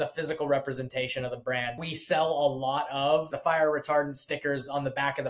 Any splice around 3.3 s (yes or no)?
yes